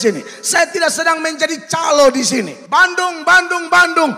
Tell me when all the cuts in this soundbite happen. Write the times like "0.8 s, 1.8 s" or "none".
2.6 s